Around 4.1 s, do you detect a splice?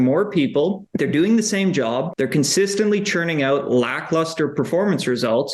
no; 2 cuts; at 0.8 s, 2.1 s

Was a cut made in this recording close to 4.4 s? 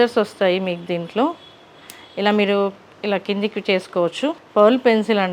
yes; 1 cut; at 4.4 s

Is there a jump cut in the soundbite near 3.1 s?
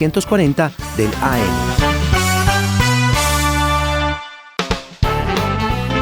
no; 2 cuts; at 1.5 s, 4.4 s

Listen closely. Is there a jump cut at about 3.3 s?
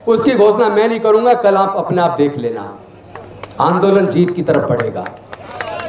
no; 0 cuts

